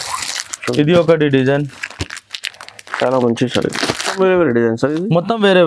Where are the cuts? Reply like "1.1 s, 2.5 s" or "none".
4.1 s